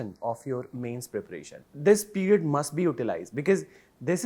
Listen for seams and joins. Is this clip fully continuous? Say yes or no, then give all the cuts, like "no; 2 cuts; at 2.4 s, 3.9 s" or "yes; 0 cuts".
no; 1 cut; at 1.6 s